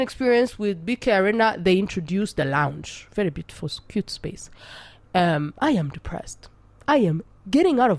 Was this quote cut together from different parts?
no; 0 cuts

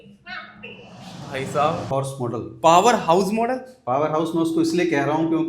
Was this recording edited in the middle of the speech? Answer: yes; 1 cut; at 1.9 s

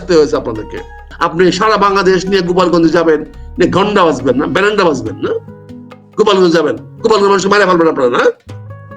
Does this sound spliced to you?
yes; 1 cut; at 1.1 s

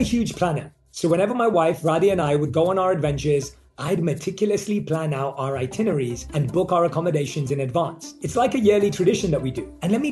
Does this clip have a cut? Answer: no; 0 cuts

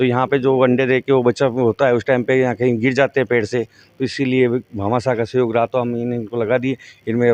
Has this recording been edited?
no; 0 cuts

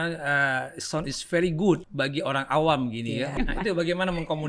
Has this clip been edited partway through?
yes; 2 cuts; at 1.9 s, 3.3 s

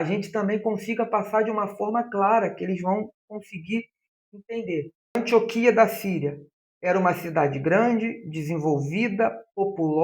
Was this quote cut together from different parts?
yes; 1 cut; at 5.1 s

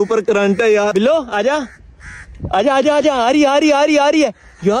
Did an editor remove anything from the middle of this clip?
yes; 1 cut; at 0.9 s

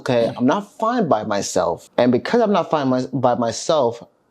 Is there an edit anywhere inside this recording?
yes; 1 cut; at 1.8 s

